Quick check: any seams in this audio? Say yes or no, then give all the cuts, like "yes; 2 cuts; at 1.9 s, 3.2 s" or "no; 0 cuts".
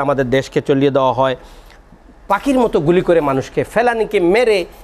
no; 0 cuts